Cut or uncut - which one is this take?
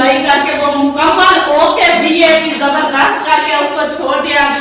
uncut